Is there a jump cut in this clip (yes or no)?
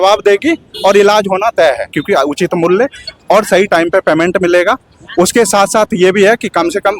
yes